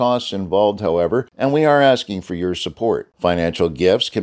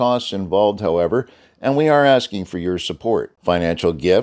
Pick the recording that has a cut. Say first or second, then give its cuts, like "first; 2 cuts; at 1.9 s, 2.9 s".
first; 1 cut; at 1.3 s